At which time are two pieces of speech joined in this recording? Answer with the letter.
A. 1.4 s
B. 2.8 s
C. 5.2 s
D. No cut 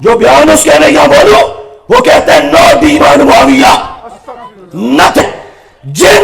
C